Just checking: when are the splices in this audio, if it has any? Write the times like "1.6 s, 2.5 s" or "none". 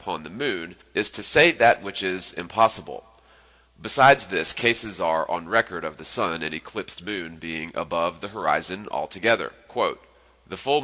4.5 s